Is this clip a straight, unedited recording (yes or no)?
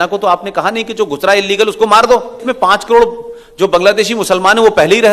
no